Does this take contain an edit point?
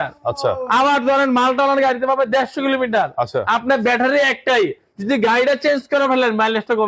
no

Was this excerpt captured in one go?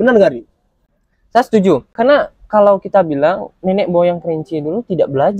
no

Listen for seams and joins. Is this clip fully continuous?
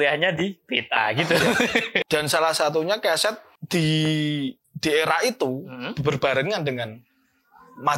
no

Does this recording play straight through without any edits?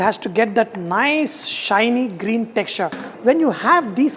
no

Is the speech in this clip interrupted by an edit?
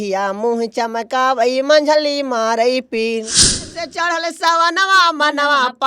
yes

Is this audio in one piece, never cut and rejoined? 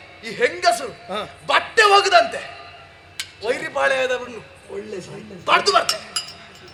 yes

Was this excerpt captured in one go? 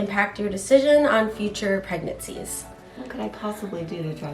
no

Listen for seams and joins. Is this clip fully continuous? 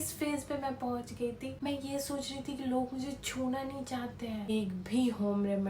no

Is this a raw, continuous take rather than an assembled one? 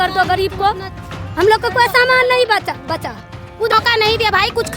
no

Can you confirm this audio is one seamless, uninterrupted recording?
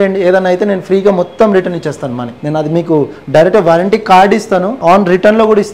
no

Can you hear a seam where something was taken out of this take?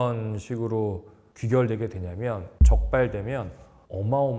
yes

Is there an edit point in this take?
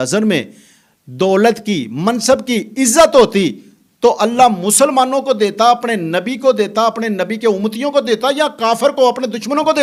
no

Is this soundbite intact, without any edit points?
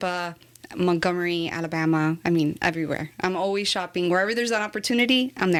yes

